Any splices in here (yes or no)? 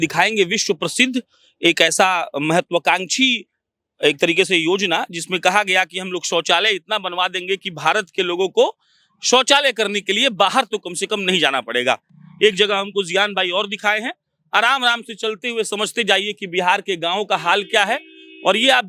no